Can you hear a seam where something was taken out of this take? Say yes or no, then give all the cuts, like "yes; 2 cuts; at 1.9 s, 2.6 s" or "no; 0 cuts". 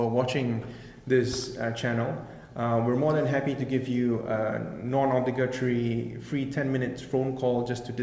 no; 0 cuts